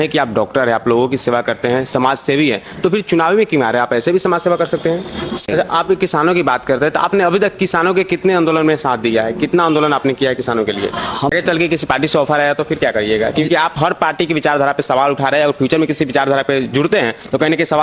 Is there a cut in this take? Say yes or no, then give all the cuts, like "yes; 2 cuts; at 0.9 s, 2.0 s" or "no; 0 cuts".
yes; 2 cuts; at 5.5 s, 11.3 s